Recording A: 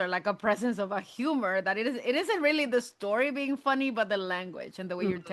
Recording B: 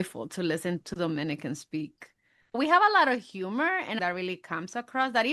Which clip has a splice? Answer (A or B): B